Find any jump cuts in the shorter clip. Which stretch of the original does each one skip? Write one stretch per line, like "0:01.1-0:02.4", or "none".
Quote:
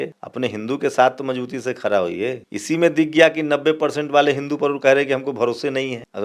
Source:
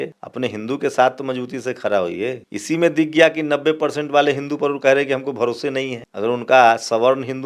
none